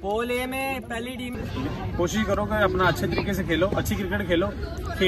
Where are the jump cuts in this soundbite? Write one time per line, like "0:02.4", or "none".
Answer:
0:01.3